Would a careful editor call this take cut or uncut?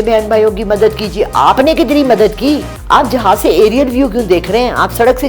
cut